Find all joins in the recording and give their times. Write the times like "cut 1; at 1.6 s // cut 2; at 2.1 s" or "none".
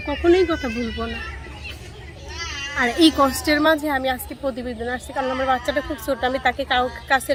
none